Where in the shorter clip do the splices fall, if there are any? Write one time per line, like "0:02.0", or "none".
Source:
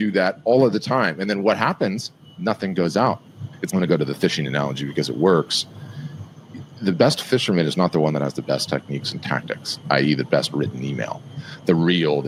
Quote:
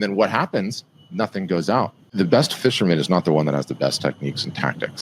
0:02.0

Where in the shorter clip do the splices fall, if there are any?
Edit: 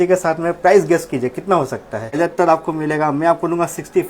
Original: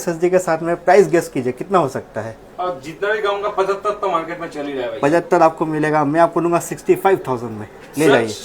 0:02.2

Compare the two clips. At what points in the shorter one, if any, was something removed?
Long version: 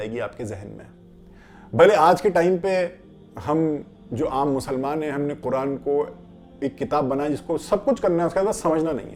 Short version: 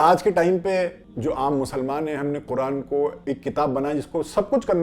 0:01.1
0:03.2

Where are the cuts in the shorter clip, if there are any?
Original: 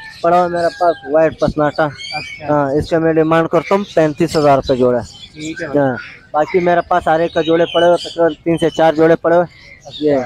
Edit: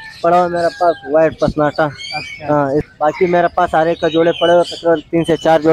0:02.9

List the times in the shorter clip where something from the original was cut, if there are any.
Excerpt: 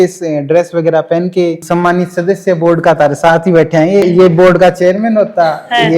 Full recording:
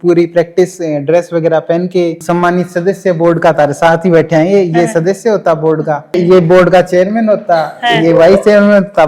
0:04.0

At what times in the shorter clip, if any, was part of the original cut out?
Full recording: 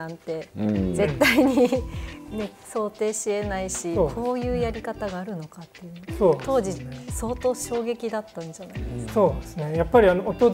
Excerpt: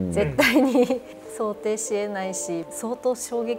0:01.2
0:02.6

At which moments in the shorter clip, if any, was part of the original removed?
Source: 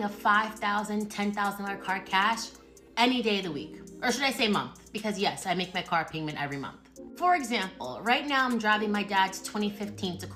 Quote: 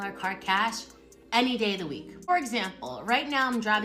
0:02.3

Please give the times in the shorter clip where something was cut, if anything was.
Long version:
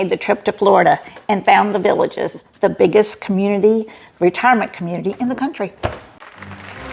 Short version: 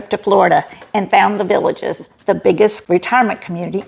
0:02.8

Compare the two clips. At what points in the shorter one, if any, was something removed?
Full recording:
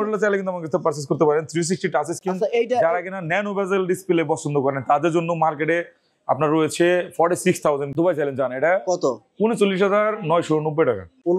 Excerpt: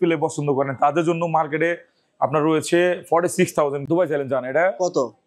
none

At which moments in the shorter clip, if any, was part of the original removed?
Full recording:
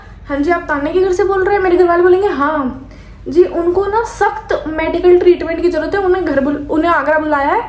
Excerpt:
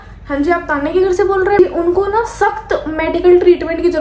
0:01.6

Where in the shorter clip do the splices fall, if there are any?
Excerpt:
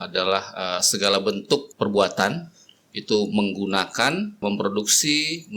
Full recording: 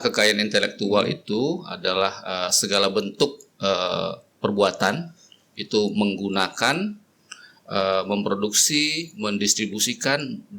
0:01.7
0:04.4

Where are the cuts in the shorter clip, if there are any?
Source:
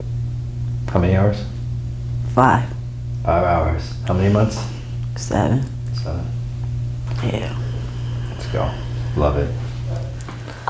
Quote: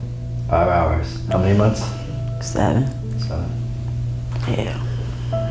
none

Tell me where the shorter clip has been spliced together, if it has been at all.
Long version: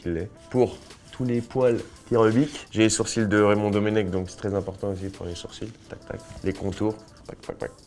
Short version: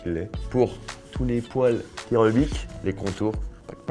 0:02.6

